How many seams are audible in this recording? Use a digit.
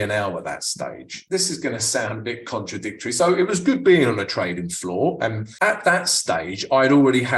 2